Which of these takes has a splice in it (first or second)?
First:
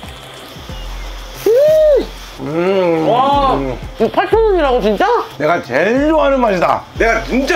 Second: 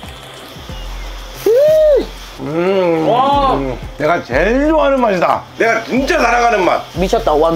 second